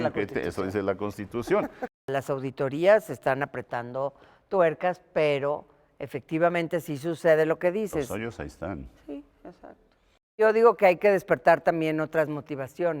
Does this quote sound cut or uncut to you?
cut